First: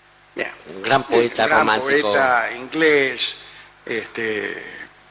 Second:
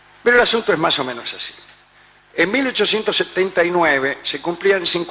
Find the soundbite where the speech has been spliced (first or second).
second